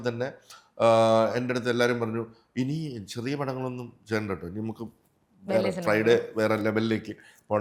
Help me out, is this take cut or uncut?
uncut